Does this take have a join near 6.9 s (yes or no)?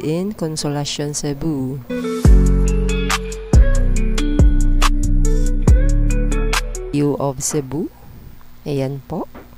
yes